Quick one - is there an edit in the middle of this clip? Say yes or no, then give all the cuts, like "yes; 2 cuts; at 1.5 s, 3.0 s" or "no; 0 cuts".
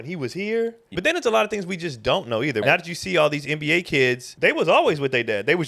yes; 3 cuts; at 0.9 s, 2.6 s, 4.3 s